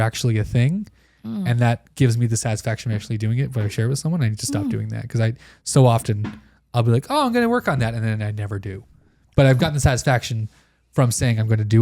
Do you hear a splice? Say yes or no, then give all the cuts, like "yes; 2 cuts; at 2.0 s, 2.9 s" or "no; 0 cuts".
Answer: yes; 1 cut; at 9.6 s